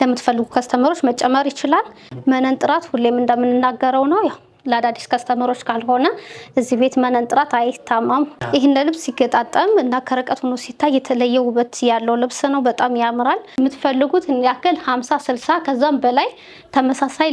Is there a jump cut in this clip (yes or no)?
yes